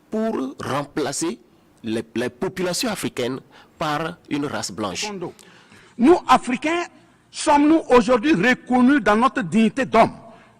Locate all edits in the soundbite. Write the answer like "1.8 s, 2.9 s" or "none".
5.6 s

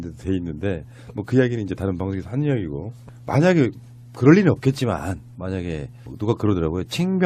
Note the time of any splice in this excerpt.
1.5 s

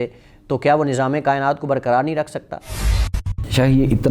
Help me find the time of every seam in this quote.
2.8 s

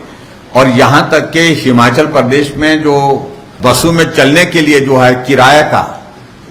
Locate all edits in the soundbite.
3.5 s

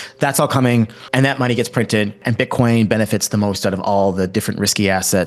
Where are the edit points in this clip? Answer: 1.0 s, 2.2 s

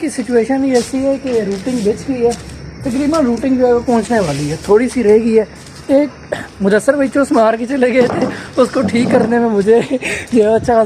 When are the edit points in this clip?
none

